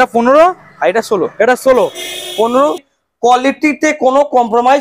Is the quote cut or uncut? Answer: cut